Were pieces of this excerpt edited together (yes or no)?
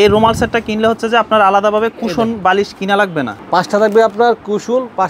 yes